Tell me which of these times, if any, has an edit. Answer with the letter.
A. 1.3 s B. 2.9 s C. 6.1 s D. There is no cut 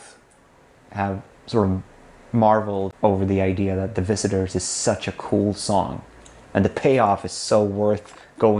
B